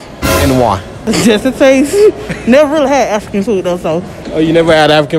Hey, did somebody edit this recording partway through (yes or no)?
yes